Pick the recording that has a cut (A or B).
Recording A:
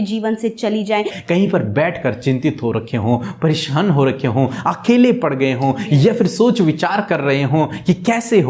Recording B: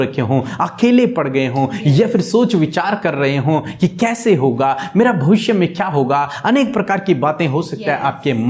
A